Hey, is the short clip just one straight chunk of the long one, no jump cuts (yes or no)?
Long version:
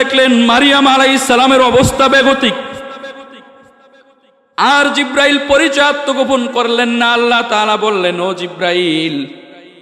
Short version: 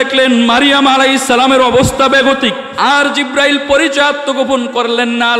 no